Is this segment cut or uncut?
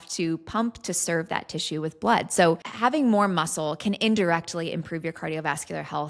cut